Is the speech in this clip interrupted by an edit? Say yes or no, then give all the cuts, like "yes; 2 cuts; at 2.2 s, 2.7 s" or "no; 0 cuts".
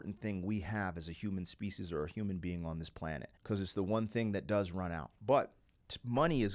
yes; 2 cuts; at 3.3 s, 5.1 s